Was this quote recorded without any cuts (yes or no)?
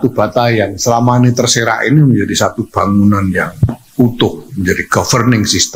yes